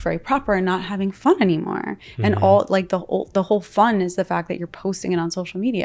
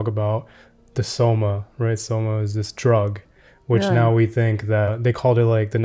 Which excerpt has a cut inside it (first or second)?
second